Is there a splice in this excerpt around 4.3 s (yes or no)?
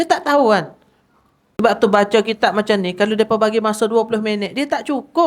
no